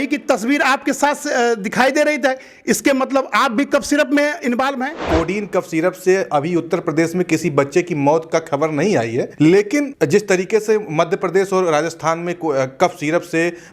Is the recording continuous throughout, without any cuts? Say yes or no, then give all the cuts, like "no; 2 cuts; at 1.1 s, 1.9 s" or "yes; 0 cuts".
no; 1 cut; at 5.0 s